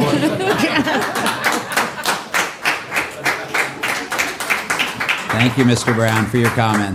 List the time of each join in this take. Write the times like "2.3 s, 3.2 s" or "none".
none